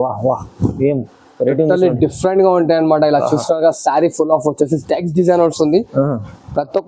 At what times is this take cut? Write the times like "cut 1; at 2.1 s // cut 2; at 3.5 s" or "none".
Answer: none